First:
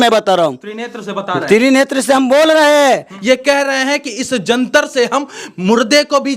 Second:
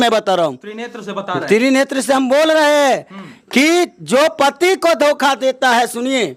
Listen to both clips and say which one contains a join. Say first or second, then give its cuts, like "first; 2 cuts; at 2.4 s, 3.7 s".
first; 1 cut; at 3.1 s